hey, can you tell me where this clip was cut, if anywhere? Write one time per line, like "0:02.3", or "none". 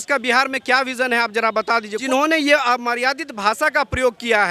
0:02.0